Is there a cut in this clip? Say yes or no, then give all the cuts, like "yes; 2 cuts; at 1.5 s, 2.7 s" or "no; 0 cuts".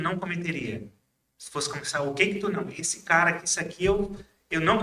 no; 0 cuts